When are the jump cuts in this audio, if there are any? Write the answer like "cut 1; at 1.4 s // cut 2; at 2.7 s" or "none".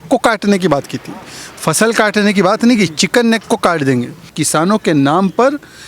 cut 1; at 4.4 s